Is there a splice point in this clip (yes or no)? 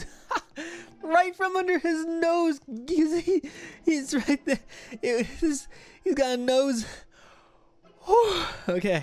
no